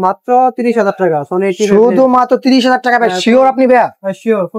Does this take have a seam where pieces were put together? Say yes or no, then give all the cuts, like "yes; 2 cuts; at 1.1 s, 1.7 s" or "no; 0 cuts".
no; 0 cuts